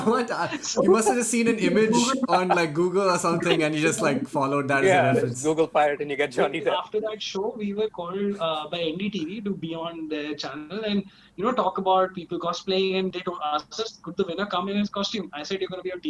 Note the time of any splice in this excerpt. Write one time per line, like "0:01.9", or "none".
0:06.8
0:13.1